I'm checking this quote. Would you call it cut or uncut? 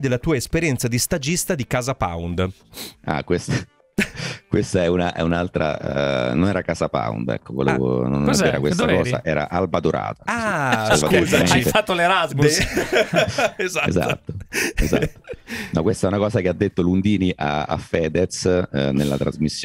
uncut